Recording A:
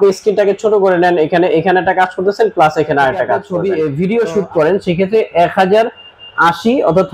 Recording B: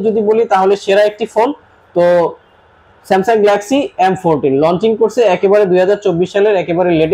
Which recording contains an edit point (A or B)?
A